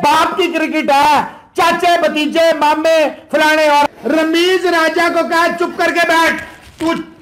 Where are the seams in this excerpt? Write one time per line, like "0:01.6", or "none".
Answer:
0:03.9